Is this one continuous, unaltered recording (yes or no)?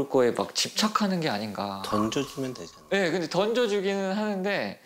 yes